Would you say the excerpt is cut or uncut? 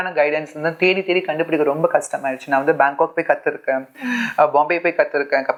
uncut